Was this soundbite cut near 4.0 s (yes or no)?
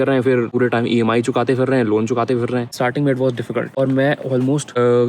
no